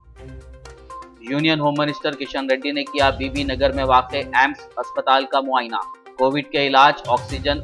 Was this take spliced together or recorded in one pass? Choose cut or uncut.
cut